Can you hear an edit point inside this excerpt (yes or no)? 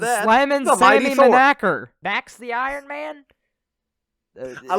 yes